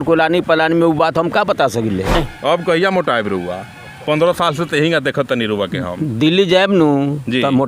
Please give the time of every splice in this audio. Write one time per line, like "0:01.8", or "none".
0:02.1

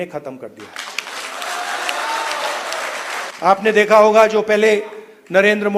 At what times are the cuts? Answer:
0:03.3

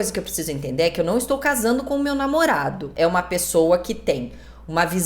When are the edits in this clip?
0:02.9

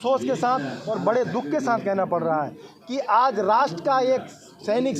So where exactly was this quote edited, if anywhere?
none

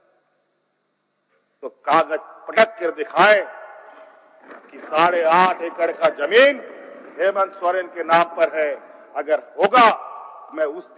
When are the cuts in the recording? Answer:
none

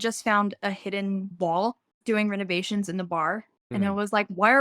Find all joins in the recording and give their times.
0:01.3
0:03.6

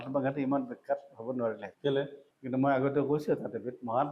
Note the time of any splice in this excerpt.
none

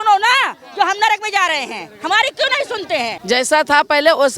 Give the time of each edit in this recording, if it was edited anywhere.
0:03.1

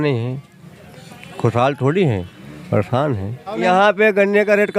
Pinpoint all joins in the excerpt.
0:03.5

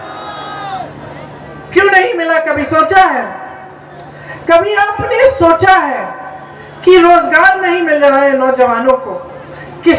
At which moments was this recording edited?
none

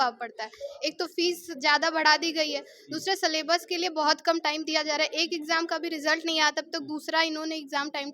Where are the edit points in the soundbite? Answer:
none

